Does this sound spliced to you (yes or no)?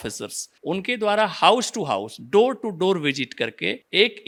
no